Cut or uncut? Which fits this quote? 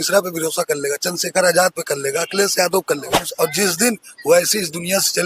cut